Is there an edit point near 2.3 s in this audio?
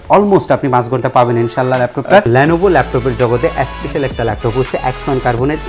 yes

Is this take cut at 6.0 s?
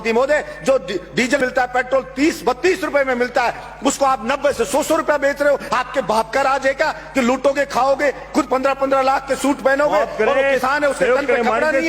no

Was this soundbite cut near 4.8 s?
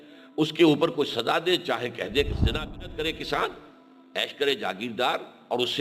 no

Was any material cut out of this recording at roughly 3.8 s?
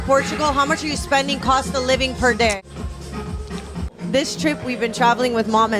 yes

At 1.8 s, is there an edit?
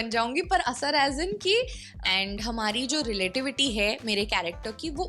yes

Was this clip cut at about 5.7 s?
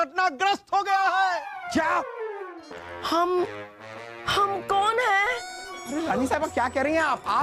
yes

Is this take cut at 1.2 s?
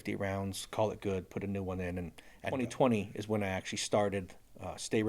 no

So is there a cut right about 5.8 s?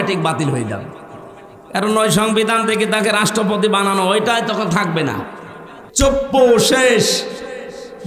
yes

